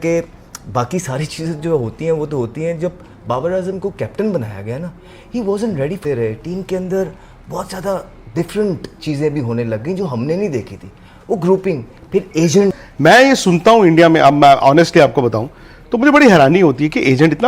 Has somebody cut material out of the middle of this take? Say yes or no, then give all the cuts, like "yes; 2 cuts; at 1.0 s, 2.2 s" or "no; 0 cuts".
yes; 2 cuts; at 6.0 s, 12.9 s